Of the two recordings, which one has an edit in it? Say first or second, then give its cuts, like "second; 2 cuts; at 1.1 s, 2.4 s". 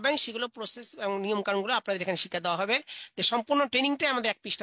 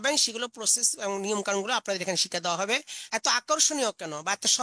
second; 1 cut; at 3.0 s